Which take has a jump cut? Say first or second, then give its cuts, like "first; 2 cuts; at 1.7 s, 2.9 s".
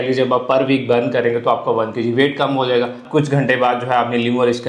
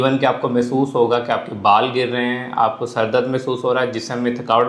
first; 1 cut; at 3.0 s